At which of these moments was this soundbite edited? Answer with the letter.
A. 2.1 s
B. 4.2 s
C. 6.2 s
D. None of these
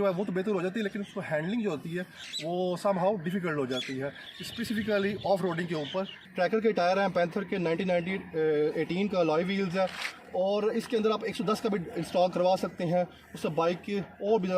C